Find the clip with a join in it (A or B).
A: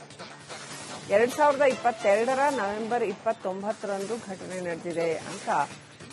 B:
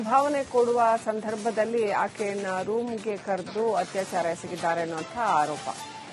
A